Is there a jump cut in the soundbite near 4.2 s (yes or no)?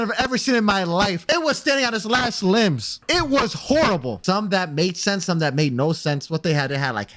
yes